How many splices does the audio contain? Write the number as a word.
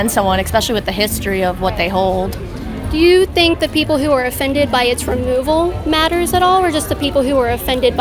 zero